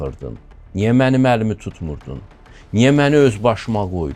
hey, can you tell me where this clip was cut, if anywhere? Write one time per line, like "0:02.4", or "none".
none